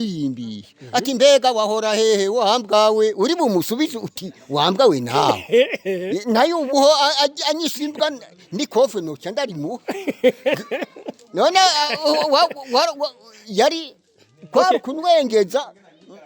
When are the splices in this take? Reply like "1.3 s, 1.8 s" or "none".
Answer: none

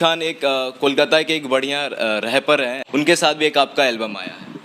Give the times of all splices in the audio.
2.8 s

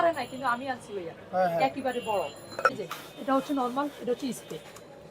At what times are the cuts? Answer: 2.7 s

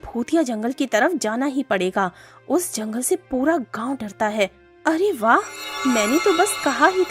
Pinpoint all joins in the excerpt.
4.7 s

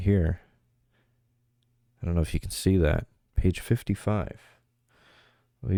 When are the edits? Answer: none

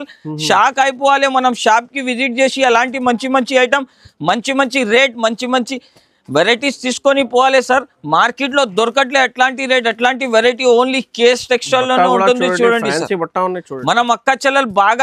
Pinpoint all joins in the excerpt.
none

